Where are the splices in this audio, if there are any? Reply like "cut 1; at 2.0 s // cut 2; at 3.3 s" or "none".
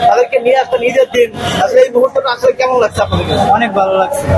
none

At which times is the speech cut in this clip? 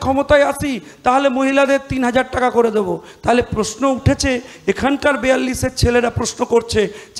none

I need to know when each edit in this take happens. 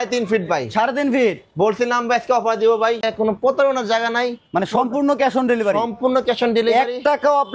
cut 1; at 3.0 s

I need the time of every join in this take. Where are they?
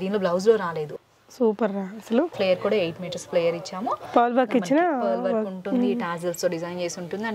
cut 1; at 0.9 s // cut 2; at 2.3 s

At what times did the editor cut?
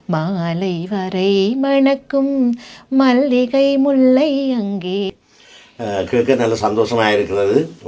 cut 1; at 5.1 s

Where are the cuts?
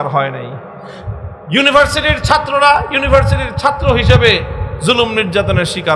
none

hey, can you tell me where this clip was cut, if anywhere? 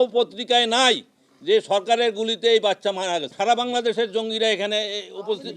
cut 1; at 3.3 s

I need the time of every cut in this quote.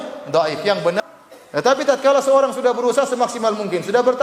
cut 1; at 1.0 s

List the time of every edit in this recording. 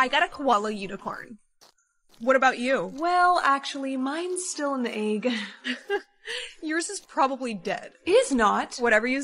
cut 1; at 7.9 s

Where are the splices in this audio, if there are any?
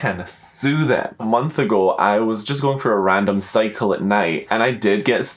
cut 1; at 1.2 s // cut 2; at 4.4 s

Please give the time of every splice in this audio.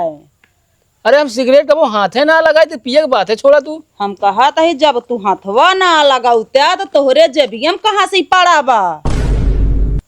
cut 1; at 9.0 s

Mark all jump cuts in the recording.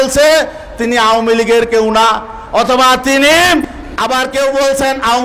cut 1; at 3.8 s

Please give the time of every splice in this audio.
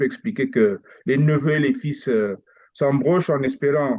none

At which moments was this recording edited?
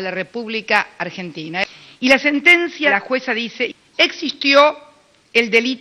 cut 1; at 1.6 s // cut 2; at 2.9 s

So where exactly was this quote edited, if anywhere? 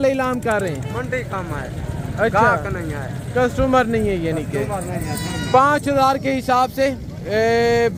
none

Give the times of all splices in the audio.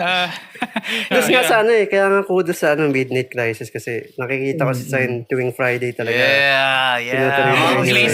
cut 1; at 1.1 s

